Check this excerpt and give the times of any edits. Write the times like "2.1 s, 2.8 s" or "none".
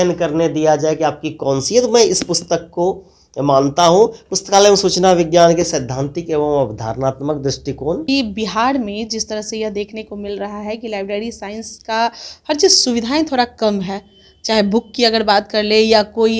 8.0 s